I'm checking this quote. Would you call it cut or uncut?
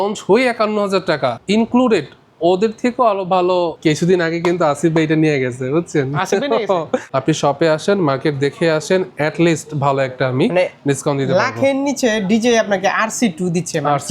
cut